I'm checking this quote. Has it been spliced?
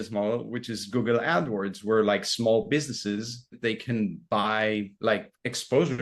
yes; 1 cut; at 3.5 s

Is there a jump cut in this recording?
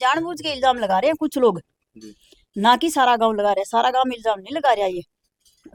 no; 0 cuts

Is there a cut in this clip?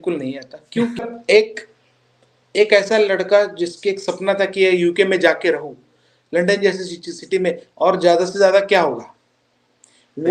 yes; 1 cut; at 1.1 s

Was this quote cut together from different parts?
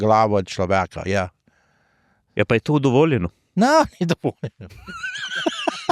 no; 0 cuts

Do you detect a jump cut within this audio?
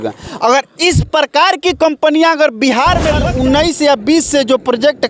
yes; 1 cut; at 3.2 s

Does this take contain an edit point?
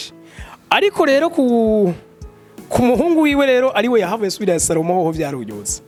no; 0 cuts

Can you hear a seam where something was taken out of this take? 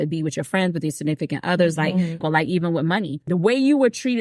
yes; 2 cuts; at 2.2 s, 3.2 s

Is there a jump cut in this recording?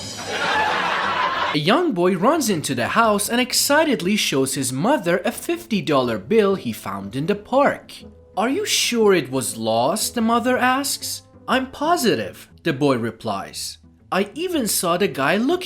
yes; 1 cut; at 1.5 s

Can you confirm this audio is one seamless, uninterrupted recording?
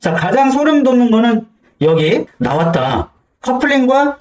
no; 1 cut; at 2.3 s

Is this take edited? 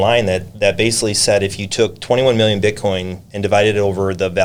no; 0 cuts

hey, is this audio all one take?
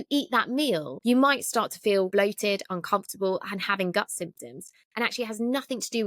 no; 2 cuts; at 0.9 s, 2.1 s

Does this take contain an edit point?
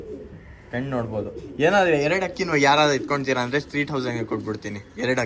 no; 0 cuts

